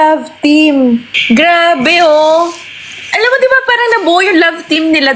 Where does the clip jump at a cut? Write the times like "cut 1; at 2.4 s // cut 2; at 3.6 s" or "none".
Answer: cut 1; at 1.1 s